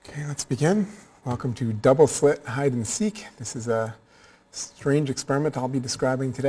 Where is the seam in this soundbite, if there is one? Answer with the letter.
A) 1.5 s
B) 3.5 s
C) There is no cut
C